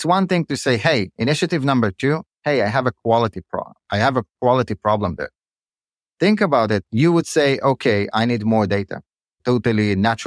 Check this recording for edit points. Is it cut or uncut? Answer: uncut